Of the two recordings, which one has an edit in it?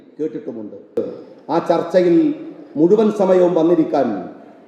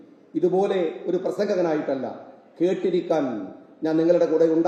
first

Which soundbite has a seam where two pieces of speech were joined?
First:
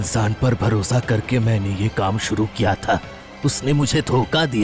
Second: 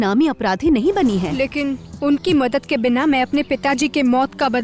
second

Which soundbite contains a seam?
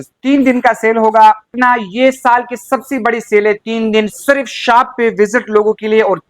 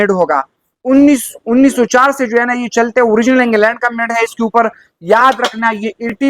first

